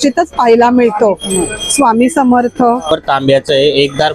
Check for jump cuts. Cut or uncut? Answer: cut